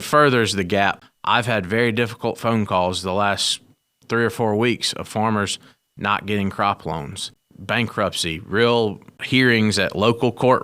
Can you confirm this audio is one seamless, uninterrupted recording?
no; 3 cuts; at 1.1 s, 7.2 s, 9.2 s

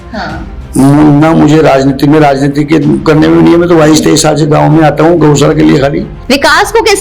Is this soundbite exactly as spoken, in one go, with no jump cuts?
no; 1 cut; at 6.1 s

